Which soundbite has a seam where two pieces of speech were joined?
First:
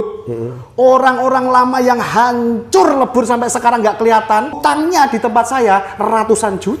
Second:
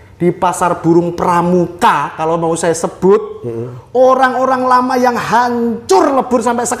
first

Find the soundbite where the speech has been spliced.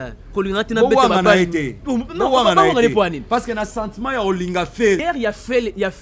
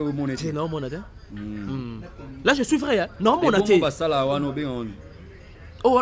first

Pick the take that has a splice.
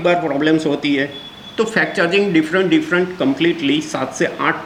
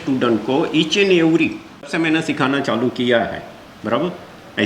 second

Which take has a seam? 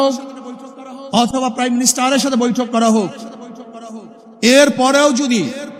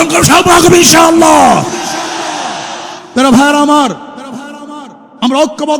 second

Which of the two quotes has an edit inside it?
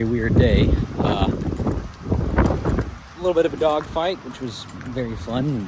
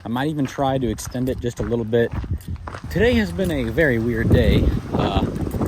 second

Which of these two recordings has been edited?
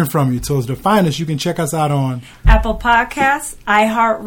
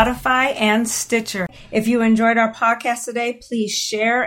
second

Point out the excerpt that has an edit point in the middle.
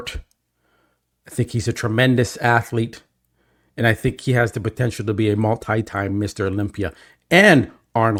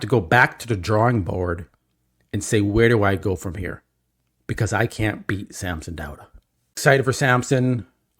second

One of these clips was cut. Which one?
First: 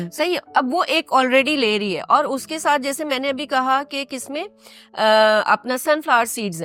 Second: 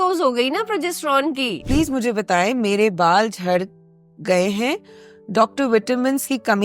second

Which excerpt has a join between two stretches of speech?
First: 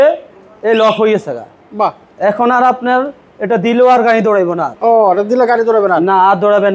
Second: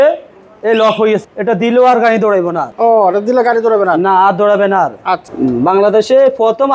second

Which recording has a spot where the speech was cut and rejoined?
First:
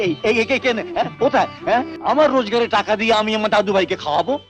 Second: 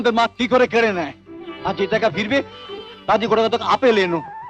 first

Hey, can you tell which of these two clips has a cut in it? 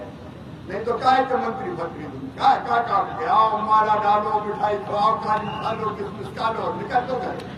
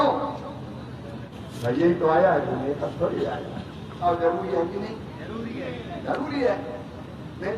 second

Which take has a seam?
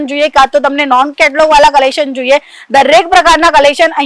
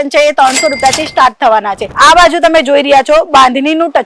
second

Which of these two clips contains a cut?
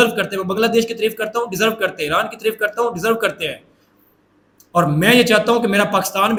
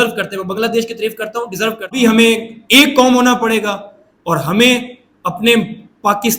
second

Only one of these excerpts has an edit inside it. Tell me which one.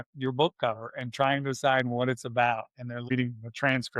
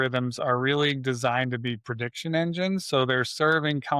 first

